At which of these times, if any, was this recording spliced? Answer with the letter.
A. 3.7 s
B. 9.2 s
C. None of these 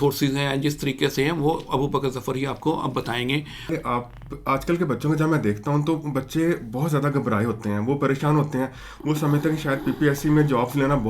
A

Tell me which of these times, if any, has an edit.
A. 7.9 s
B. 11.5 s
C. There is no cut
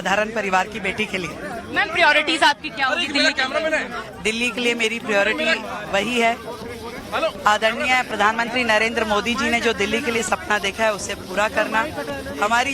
B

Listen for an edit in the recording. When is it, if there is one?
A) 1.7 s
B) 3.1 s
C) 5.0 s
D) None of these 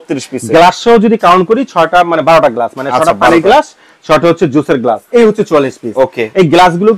C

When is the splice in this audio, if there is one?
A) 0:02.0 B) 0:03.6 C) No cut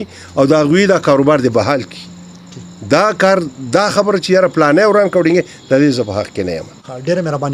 C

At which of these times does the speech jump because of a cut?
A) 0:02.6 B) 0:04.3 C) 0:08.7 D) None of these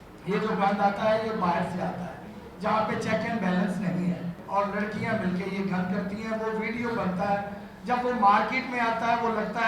B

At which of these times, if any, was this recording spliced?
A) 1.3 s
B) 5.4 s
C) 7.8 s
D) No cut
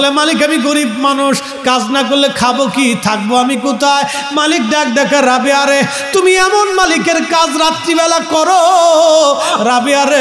D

